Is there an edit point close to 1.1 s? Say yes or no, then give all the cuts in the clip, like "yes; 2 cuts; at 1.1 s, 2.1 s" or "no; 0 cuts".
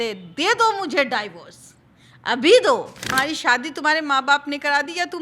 no; 1 cut; at 3.1 s